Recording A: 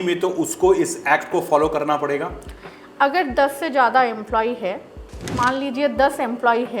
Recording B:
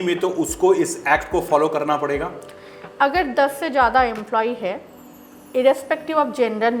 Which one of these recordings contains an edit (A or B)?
A